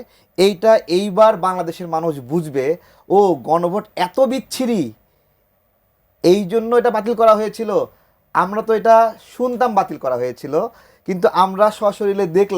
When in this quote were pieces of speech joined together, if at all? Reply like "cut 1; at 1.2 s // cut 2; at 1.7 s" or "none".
none